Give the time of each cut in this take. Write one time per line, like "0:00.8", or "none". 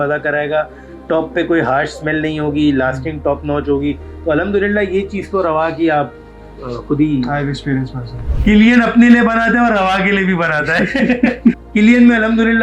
0:08.2
0:11.6